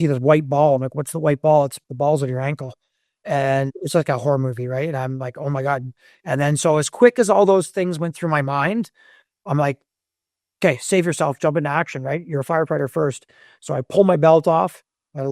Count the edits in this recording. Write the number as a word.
one